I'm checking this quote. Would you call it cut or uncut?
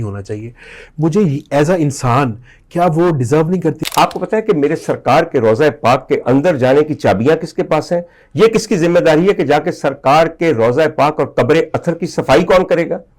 cut